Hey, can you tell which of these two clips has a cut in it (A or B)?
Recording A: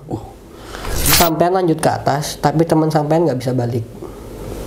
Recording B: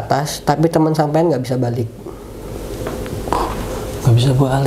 A